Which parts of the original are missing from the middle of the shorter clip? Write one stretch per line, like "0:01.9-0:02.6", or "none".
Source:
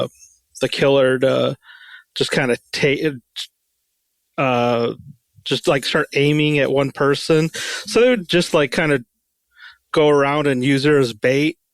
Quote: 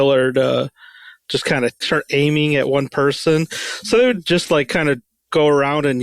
0:02.7-0:05.9
0:09.2-0:09.7